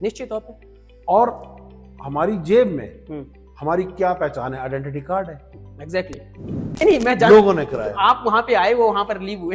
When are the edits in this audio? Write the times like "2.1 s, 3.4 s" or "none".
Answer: 6.8 s